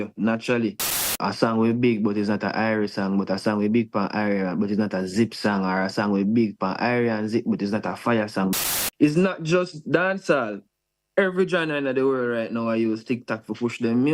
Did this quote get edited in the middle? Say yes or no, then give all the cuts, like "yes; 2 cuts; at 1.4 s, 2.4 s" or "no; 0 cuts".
yes; 2 cuts; at 1.1 s, 8.5 s